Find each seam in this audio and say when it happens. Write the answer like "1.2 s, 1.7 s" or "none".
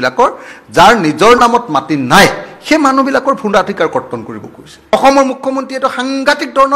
4.9 s